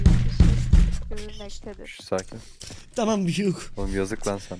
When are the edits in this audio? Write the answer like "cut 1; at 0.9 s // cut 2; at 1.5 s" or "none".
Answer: cut 1; at 3.7 s